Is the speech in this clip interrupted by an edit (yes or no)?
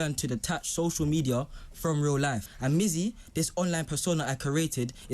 yes